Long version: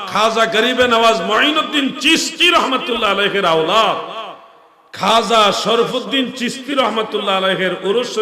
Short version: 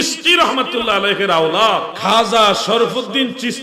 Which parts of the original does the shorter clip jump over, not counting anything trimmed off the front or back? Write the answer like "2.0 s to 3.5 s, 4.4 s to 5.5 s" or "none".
4.1 s to 4.9 s